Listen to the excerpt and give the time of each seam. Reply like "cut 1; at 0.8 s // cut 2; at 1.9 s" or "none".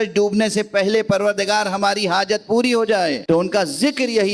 cut 1; at 3.2 s

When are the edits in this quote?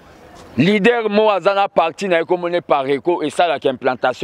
none

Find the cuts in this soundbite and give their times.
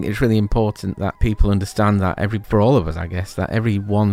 cut 1; at 1.2 s // cut 2; at 2.4 s

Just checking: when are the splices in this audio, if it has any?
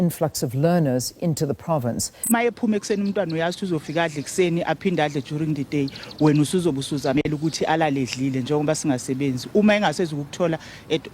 cut 1; at 2.2 s

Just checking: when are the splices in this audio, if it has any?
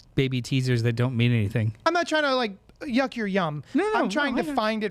cut 1; at 1.8 s

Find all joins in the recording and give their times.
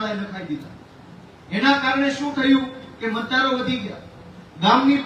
none

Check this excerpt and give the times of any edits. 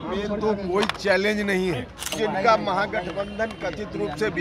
cut 1; at 2.1 s

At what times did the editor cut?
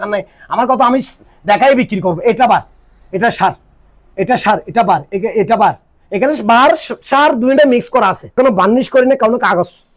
cut 1; at 8.3 s

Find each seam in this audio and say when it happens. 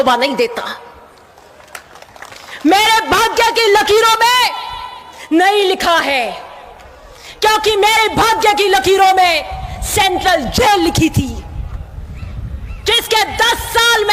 none

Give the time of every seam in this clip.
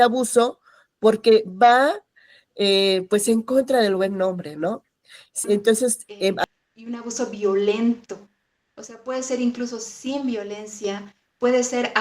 cut 1; at 6.4 s

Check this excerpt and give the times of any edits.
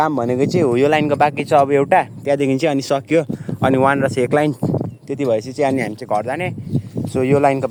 none

